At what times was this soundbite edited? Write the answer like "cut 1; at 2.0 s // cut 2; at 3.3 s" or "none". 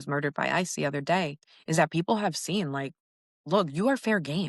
none